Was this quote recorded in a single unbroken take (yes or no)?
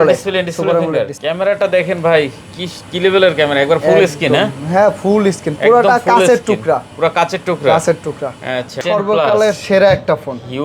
no